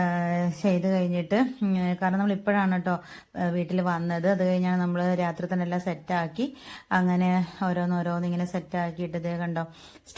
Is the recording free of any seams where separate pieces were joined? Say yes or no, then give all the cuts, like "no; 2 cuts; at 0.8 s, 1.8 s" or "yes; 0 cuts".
yes; 0 cuts